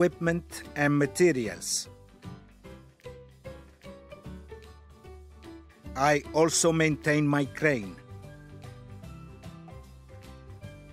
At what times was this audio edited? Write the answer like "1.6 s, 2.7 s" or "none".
1.6 s, 4.2 s, 5.9 s, 8.0 s